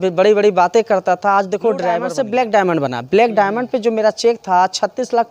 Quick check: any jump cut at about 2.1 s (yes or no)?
yes